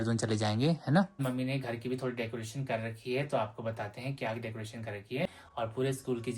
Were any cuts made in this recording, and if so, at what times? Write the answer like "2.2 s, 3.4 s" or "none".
1.2 s, 5.3 s